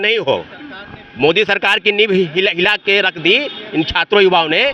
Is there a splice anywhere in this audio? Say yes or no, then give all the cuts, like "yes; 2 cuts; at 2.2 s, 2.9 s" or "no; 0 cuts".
no; 0 cuts